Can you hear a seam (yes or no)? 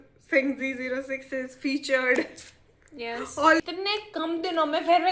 yes